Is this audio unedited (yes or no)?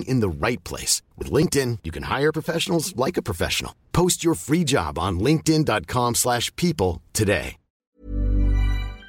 no